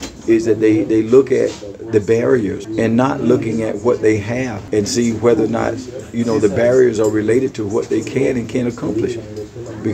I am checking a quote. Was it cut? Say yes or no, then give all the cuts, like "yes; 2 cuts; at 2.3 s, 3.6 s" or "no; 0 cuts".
yes; 2 cuts; at 2.6 s, 4.6 s